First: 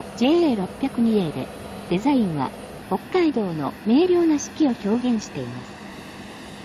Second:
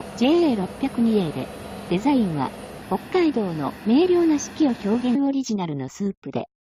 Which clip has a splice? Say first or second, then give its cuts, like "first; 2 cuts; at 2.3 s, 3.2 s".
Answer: first; 1 cut; at 5.2 s